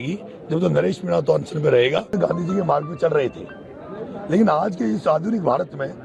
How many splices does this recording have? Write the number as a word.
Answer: one